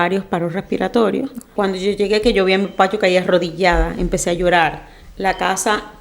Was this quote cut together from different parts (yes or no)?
yes